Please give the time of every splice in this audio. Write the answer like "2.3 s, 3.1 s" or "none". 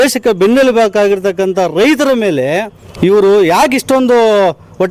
2.8 s